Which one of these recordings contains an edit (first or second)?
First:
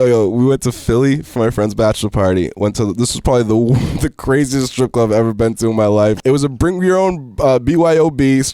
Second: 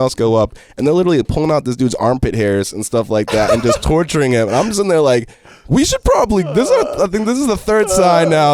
first